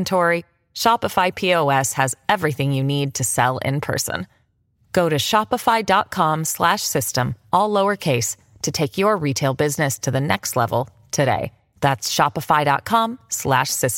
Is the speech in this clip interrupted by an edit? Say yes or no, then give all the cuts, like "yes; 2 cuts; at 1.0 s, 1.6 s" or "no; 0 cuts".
no; 0 cuts